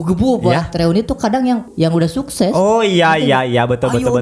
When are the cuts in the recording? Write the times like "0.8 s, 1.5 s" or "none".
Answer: 1.7 s